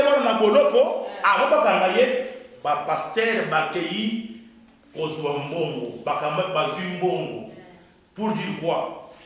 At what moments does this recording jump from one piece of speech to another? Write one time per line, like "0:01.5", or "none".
none